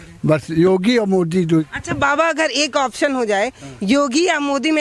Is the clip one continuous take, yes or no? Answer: no